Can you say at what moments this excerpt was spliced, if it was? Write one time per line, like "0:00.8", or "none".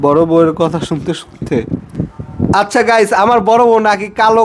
0:01.9

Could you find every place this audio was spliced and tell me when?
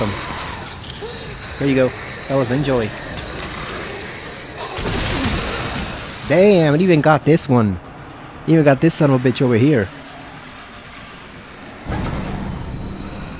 0:11.8

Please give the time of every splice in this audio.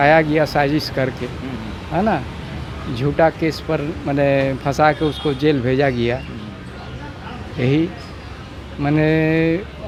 none

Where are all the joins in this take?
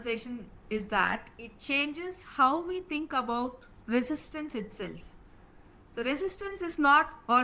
none

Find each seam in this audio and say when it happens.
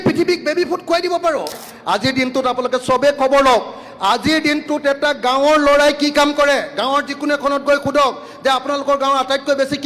0:01.6

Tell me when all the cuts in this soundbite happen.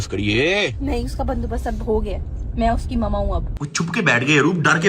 0:03.6

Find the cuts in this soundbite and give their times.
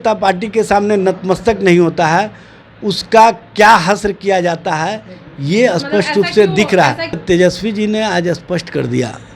0:07.2

